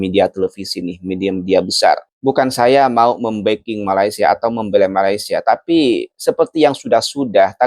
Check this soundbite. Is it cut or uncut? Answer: cut